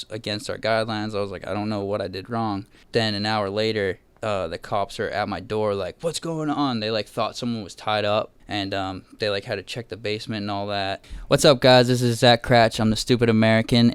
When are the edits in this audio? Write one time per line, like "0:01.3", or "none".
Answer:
0:02.8
0:08.4
0:11.1